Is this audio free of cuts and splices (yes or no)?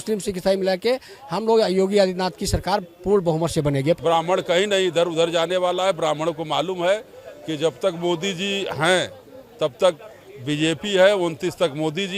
no